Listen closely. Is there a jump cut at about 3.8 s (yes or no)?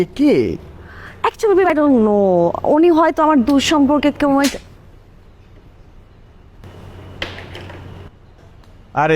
no